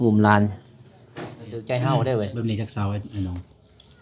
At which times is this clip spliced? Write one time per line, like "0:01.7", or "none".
0:01.5